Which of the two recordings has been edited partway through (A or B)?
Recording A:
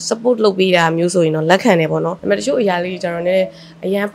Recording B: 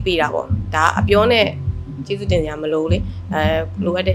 A